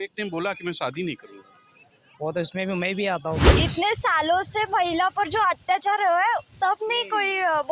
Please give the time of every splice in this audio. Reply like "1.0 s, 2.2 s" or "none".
3.5 s